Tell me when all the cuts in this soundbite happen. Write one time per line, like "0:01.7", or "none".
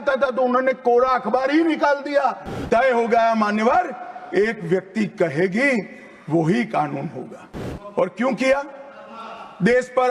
0:02.6

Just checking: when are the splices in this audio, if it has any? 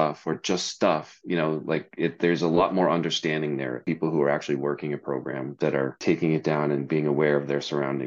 0:03.8
0:06.0

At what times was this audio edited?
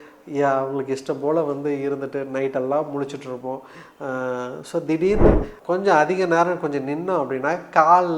0:05.5

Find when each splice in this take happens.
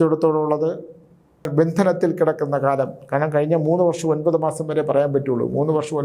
0:01.4

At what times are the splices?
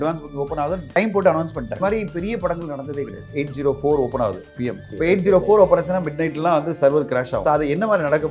0:01.0
0:01.8
0:03.3
0:04.9
0:07.4

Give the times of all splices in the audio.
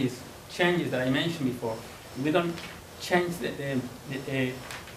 none

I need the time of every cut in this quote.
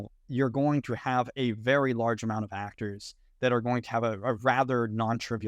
none

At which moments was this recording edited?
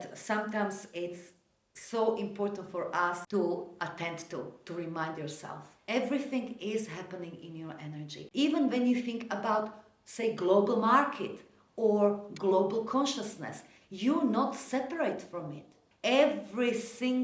0:03.2
0:08.2

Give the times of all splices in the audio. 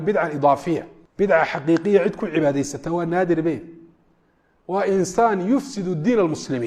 0:01.0

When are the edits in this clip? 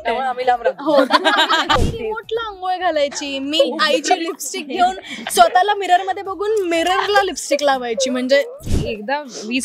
0:01.8
0:08.7

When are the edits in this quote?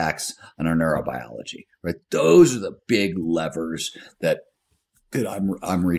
none

